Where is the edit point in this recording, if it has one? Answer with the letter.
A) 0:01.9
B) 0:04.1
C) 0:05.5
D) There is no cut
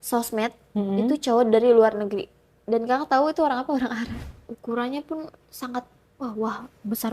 B